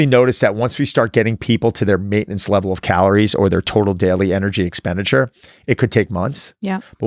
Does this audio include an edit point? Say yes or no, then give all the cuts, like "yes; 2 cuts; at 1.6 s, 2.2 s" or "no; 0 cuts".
no; 0 cuts